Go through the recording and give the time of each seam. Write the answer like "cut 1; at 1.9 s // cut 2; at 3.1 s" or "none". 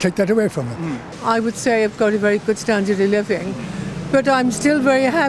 cut 1; at 1.0 s